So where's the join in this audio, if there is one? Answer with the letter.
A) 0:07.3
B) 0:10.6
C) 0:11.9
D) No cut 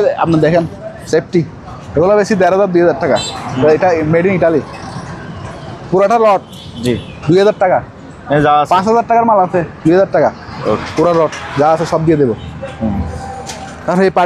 D